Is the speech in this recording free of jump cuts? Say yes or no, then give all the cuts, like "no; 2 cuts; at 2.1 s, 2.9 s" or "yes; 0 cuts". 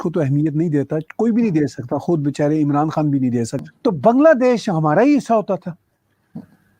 no; 1 cut; at 3.6 s